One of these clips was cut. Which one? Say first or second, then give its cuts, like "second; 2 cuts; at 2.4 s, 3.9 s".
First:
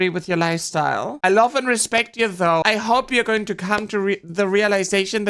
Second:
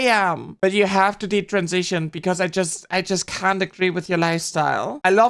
first; 1 cut; at 2.6 s